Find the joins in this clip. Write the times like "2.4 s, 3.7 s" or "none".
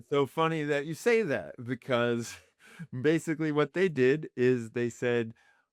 none